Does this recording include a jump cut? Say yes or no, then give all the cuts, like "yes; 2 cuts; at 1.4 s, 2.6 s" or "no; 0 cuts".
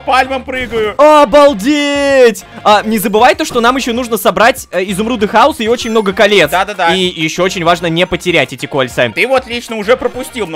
no; 0 cuts